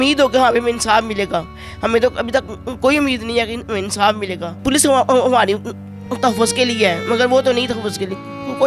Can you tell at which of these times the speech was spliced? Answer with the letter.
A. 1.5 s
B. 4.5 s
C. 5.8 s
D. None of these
B